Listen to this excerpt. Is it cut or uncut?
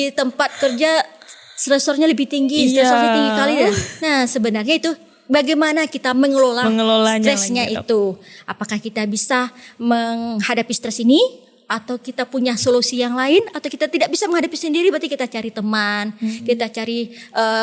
uncut